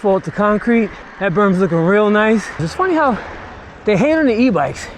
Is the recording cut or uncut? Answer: cut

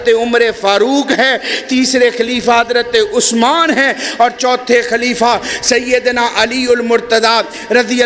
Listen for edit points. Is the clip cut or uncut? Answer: uncut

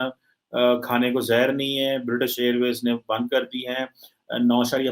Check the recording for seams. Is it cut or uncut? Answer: uncut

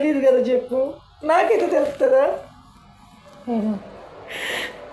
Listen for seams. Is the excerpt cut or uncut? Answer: uncut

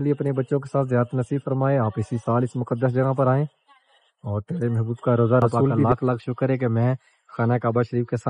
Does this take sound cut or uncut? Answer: cut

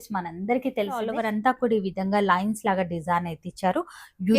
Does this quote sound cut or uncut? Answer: cut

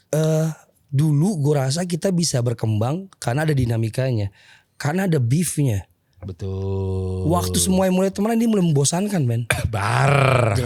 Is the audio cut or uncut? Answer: uncut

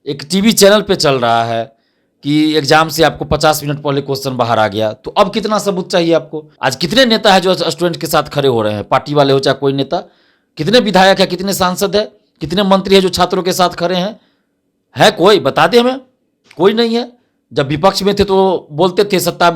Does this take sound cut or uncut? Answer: cut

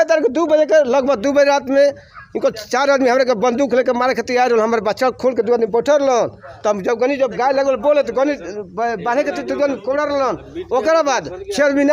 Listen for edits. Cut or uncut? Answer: uncut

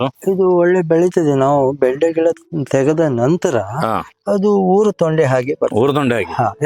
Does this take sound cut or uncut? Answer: cut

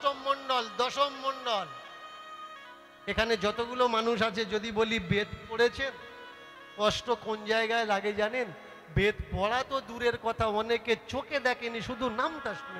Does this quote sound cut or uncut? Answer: uncut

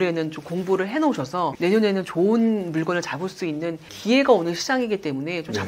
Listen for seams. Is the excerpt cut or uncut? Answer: cut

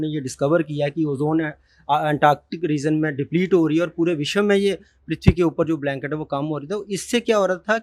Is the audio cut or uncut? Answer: uncut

